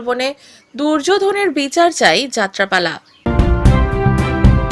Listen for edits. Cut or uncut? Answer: cut